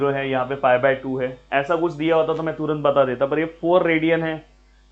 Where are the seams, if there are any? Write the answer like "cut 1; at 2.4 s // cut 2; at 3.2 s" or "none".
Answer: none